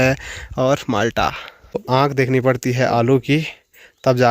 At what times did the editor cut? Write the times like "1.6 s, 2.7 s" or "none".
1.8 s